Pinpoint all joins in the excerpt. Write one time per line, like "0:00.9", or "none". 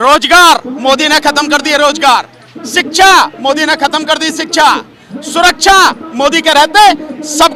none